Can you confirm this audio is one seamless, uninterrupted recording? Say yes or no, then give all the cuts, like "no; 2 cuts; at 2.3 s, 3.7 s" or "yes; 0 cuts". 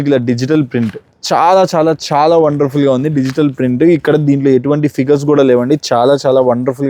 yes; 0 cuts